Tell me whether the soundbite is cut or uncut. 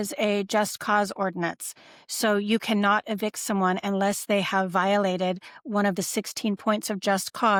uncut